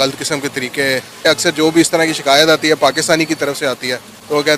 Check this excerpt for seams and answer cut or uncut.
cut